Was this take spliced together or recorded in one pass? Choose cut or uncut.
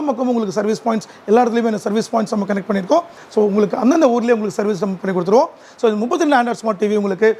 uncut